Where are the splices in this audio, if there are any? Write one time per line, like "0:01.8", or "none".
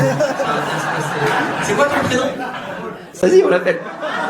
0:03.1